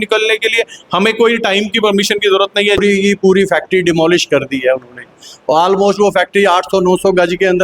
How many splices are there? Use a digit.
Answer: 1